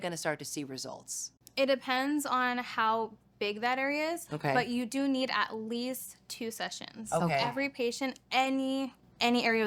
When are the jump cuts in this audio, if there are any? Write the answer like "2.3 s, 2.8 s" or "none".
none